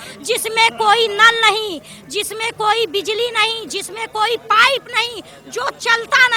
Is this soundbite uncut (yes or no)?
yes